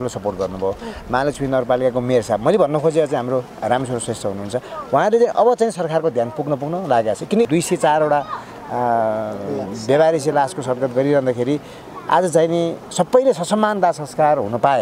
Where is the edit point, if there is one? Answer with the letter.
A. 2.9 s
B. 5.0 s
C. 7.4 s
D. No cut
C